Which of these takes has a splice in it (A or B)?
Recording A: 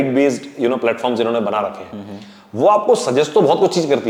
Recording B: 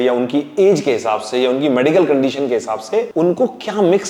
B